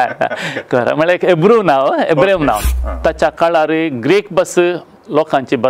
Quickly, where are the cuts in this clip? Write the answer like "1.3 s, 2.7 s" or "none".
2.7 s